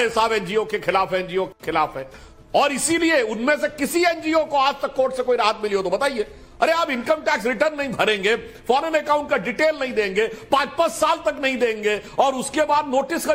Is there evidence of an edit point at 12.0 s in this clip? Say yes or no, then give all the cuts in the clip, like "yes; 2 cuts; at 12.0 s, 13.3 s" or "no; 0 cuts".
no; 0 cuts